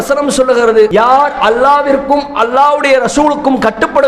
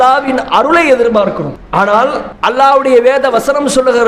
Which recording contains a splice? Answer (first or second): second